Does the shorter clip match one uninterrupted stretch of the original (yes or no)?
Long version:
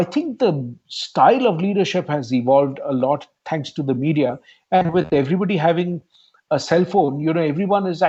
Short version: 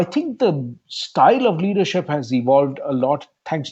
yes